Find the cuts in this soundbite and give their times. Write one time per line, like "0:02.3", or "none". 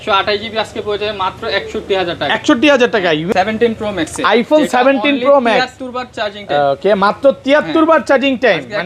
0:03.2